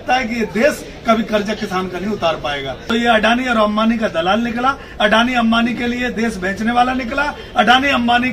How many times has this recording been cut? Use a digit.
1